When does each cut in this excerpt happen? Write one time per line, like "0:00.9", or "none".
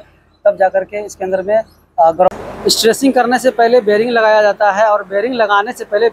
0:02.3